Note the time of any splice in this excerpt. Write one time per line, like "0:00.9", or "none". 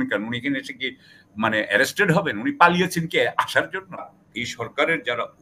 0:04.1